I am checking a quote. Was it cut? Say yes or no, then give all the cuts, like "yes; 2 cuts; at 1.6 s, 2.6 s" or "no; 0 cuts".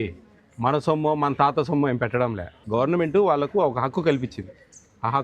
yes; 1 cut; at 2.6 s